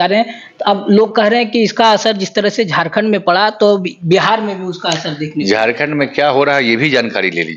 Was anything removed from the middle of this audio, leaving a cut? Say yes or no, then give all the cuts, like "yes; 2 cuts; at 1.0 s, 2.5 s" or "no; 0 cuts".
no; 0 cuts